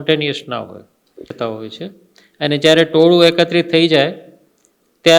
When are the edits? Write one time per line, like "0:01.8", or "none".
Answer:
0:01.3